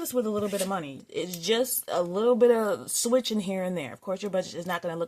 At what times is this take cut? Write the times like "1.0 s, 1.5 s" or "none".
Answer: 0.9 s

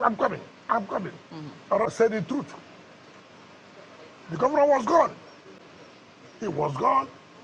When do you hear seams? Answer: 1.9 s

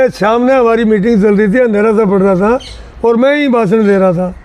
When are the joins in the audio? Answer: none

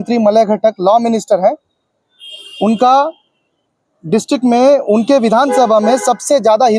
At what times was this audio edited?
none

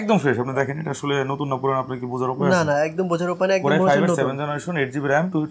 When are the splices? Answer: none

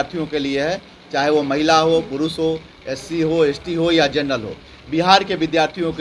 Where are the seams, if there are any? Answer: none

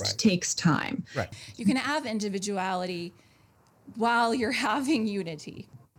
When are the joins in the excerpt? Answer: 1.2 s

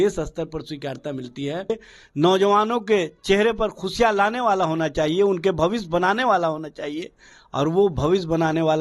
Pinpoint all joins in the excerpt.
1.9 s

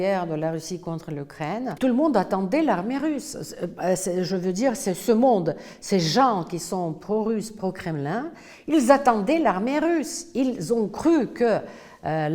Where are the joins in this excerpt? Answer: 1.7 s

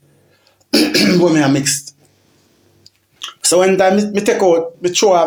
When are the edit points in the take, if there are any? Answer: none

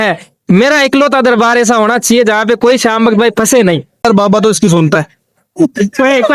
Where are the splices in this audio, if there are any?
4.1 s

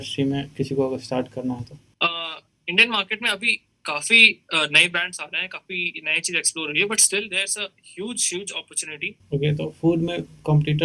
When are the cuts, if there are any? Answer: 1.8 s, 9.1 s

